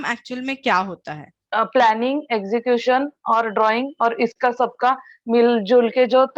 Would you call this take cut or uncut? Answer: cut